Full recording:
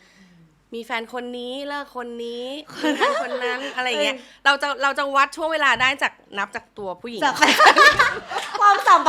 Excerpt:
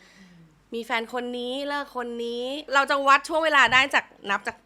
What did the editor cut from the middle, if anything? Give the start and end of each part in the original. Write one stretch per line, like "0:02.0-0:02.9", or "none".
0:02.7-0:04.8